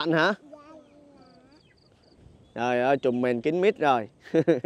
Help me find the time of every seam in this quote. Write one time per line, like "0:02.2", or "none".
0:02.2